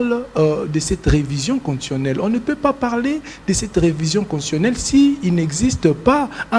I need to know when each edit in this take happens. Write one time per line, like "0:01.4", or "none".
none